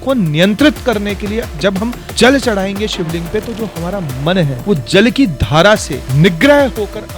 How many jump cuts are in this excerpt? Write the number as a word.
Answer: three